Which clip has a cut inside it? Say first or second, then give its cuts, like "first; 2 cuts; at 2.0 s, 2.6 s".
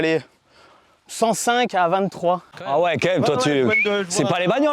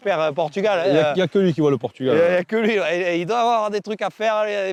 first; 1 cut; at 2.5 s